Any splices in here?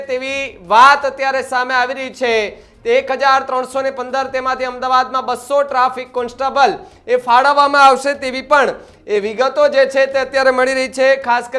no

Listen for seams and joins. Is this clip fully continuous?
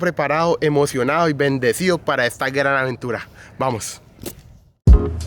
yes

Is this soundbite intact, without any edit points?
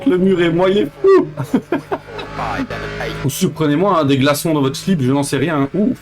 no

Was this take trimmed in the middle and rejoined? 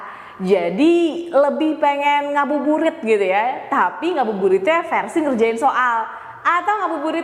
no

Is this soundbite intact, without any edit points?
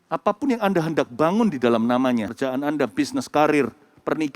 no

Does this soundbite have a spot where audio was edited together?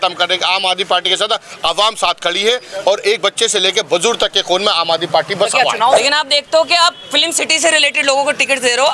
yes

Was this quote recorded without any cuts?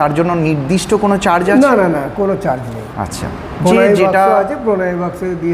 yes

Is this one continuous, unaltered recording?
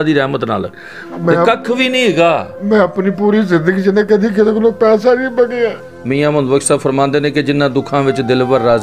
no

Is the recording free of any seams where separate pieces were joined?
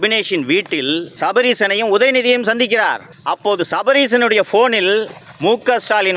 no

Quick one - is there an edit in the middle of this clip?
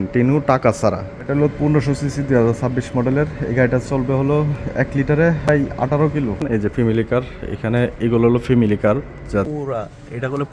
yes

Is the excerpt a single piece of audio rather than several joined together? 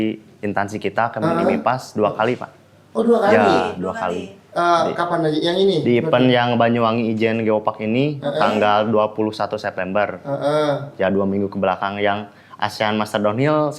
yes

